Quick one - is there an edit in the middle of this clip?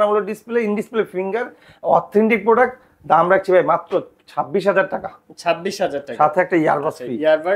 no; 0 cuts

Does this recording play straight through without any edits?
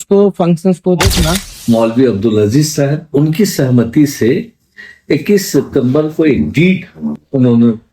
no; 1 cut; at 1.5 s

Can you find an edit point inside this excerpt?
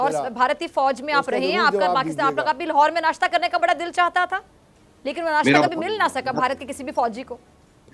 no; 0 cuts

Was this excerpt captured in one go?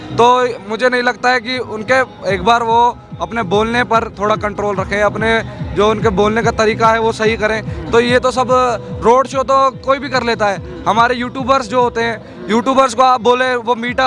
yes; 0 cuts

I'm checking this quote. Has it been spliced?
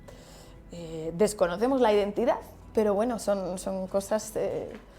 no; 0 cuts

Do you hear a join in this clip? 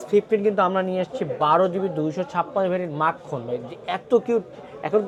no; 0 cuts

